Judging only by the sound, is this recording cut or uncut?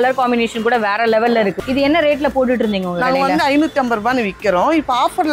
cut